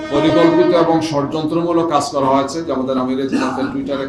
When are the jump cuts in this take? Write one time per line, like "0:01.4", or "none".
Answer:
none